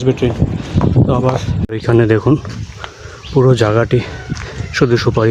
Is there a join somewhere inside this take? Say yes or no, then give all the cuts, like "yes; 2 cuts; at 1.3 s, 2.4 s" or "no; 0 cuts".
yes; 1 cut; at 1.6 s